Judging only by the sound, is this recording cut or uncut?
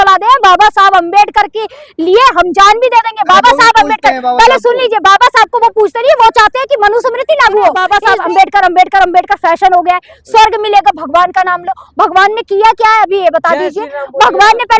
cut